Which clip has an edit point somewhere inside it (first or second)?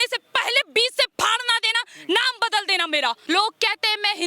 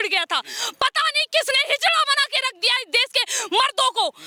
first